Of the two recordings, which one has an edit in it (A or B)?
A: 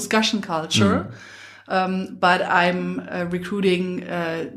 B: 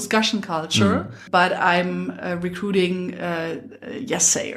B